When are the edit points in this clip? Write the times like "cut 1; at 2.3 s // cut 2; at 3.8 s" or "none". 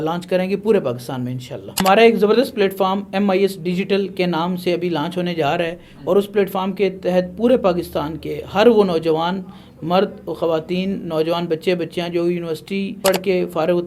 cut 1; at 1.7 s